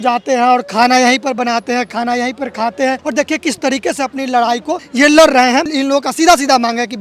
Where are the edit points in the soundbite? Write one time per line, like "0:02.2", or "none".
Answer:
0:03.0
0:05.7